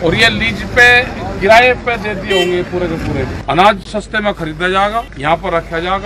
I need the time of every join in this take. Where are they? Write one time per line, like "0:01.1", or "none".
0:03.4
0:05.1